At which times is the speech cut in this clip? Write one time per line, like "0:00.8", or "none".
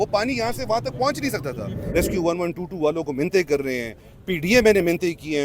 0:01.8